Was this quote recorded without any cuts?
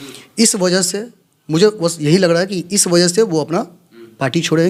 yes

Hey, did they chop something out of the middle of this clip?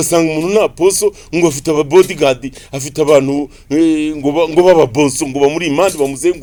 no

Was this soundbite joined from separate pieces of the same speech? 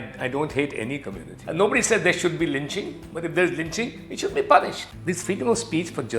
yes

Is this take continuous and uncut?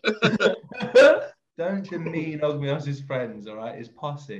no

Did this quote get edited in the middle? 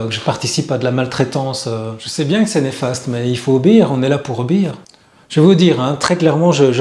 no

